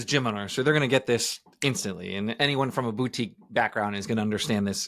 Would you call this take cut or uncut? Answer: uncut